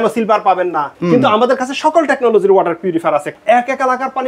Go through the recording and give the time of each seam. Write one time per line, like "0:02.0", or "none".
0:01.0
0:03.3